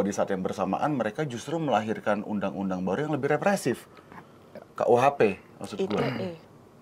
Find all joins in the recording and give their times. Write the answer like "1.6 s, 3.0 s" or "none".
none